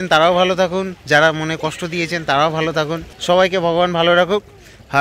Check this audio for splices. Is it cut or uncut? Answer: cut